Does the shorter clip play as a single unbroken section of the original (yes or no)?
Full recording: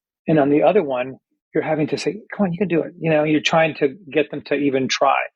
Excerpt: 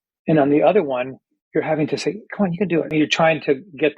no